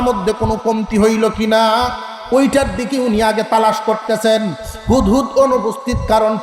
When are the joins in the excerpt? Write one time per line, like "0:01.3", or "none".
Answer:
none